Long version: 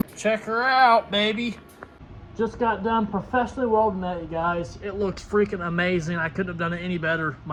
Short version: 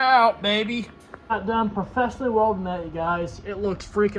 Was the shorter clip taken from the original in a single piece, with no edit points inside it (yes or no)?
no